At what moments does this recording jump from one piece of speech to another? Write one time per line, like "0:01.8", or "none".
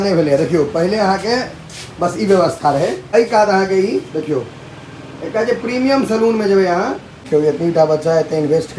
0:03.0
0:07.3